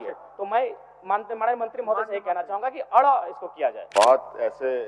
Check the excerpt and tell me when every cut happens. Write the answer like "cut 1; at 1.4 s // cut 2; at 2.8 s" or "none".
cut 1; at 3.8 s